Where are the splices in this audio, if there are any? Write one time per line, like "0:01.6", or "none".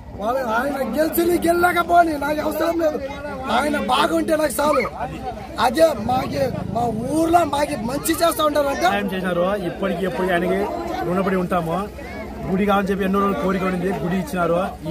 0:09.0